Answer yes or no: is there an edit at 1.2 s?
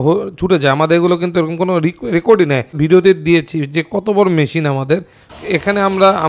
no